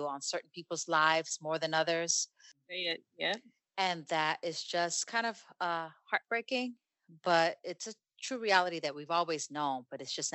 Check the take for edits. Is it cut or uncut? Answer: uncut